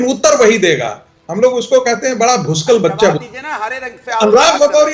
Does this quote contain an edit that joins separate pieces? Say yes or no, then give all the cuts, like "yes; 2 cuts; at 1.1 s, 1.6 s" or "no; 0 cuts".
no; 0 cuts